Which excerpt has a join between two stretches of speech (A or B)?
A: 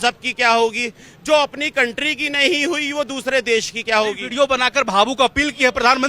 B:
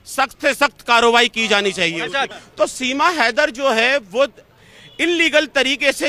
B